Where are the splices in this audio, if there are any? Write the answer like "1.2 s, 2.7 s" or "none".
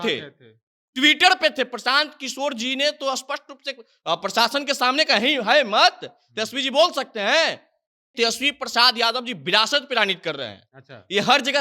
8.0 s